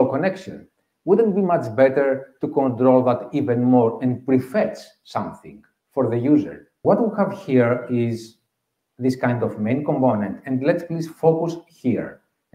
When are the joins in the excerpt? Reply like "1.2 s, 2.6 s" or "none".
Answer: 6.7 s